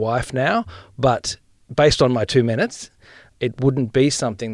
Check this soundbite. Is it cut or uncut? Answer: cut